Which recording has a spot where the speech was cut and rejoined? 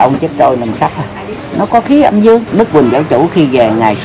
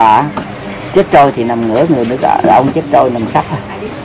first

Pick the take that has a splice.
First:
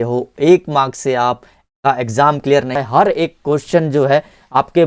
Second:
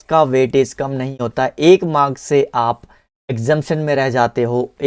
first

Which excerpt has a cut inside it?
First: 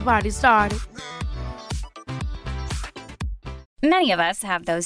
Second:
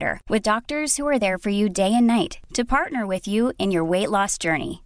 first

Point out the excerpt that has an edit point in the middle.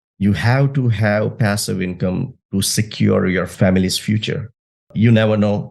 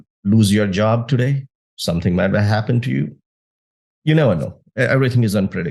first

